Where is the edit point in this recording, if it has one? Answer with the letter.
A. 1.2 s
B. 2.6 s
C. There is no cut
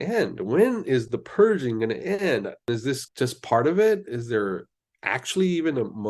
B